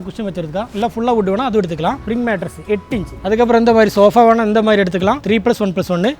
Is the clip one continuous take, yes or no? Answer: no